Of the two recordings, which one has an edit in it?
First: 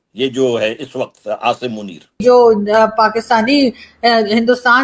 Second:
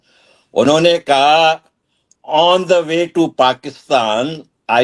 first; 1 cut; at 2.1 s

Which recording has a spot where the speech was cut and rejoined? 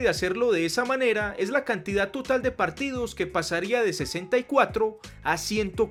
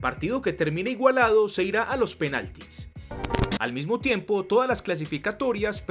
second; 1 cut; at 3.1 s

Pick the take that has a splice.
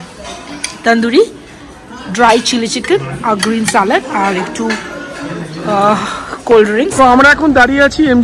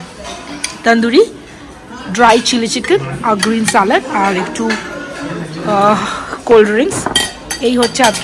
first; 1 cut; at 6.9 s

